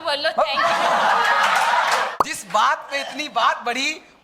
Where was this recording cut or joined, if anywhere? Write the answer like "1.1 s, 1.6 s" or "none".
2.1 s